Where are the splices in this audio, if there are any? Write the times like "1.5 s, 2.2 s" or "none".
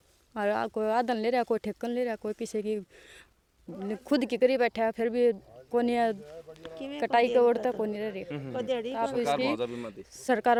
none